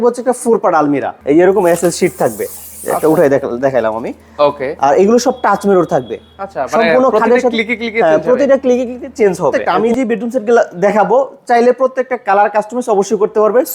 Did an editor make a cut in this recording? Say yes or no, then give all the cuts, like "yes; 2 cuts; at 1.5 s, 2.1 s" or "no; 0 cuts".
yes; 2 cuts; at 1.1 s, 9.7 s